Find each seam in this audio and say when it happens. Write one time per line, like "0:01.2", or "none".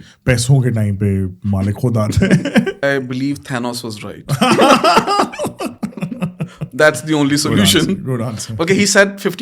0:02.8